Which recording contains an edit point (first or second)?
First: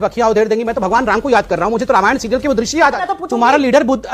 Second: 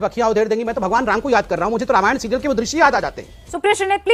first